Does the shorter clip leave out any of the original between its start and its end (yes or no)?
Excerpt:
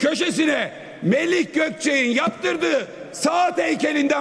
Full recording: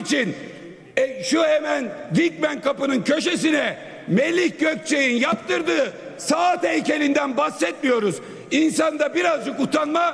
no